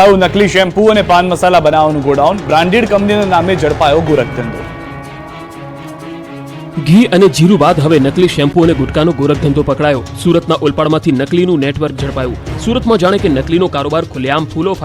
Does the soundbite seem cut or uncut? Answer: uncut